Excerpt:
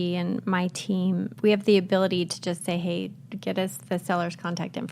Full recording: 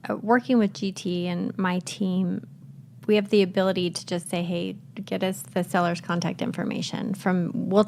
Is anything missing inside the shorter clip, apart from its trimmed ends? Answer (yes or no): yes